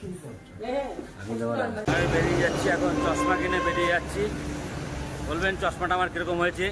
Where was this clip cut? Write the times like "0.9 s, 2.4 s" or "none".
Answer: 1.9 s

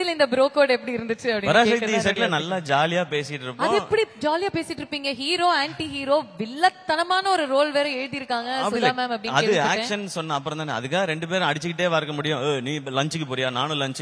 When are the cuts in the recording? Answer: none

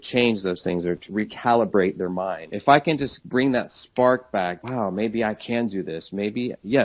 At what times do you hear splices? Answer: 1.1 s, 2.5 s, 3.2 s, 4.6 s

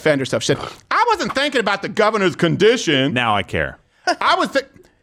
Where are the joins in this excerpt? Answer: none

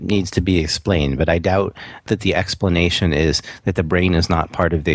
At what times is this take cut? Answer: 2.1 s

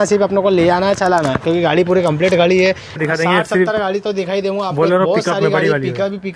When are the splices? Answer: 3.0 s

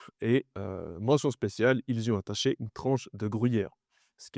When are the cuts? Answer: none

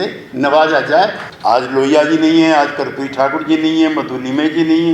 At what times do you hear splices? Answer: 1.3 s

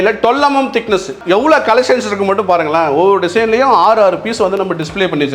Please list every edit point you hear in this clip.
1.1 s

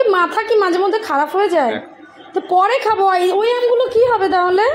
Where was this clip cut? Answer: none

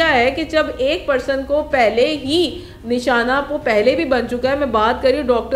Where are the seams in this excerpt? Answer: none

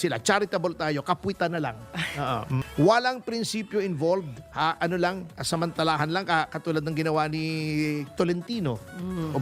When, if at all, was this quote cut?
2.6 s

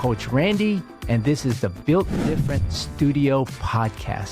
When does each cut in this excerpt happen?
none

